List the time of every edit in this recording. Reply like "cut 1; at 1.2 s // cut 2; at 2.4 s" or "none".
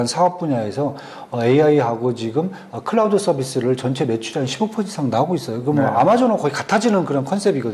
none